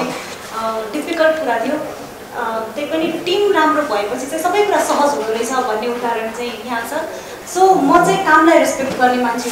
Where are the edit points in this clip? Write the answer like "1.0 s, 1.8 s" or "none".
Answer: 7.3 s

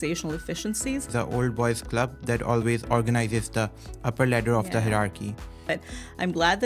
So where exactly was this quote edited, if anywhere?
1.1 s, 5.7 s

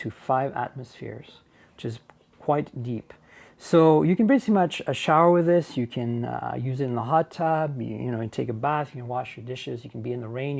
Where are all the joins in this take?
1.4 s

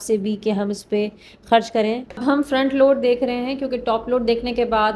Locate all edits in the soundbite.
2.2 s

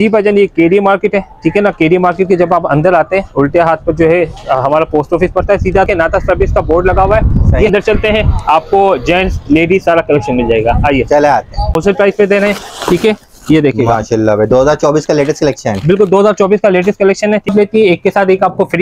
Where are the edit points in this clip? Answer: 5.9 s, 7.7 s, 11.8 s, 17.5 s

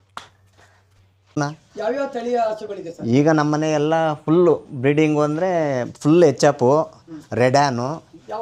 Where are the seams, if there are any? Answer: 1.4 s

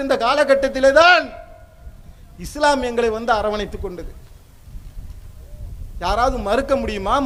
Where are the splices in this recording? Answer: none

